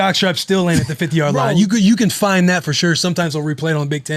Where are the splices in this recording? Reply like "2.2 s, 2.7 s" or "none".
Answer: none